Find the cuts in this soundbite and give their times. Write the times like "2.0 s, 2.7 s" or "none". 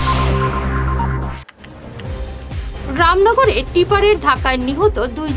1.1 s